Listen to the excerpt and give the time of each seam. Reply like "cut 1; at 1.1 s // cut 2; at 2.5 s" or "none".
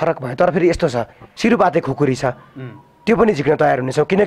cut 1; at 1.3 s